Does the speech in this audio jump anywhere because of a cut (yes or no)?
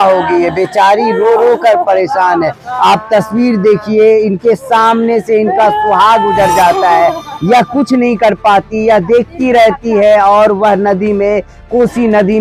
no